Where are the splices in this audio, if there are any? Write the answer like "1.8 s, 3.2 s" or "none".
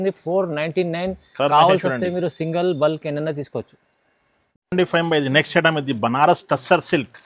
none